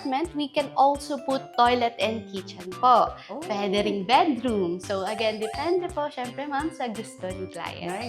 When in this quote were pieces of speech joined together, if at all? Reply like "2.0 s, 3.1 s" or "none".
none